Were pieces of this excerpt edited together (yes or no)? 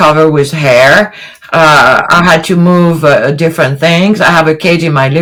no